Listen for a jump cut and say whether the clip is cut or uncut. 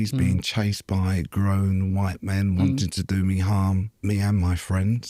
cut